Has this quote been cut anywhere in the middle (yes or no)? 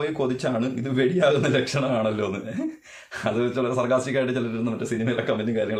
no